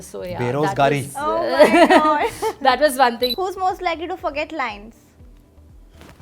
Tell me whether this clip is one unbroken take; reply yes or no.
no